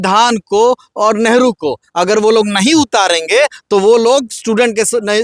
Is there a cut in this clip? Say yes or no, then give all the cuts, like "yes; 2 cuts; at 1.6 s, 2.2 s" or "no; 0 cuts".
no; 0 cuts